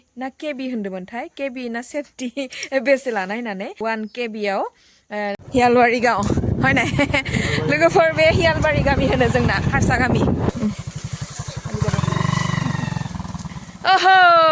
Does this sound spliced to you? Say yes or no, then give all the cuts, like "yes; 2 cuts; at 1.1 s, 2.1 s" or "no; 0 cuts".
yes; 3 cuts; at 3.7 s, 5.4 s, 10.5 s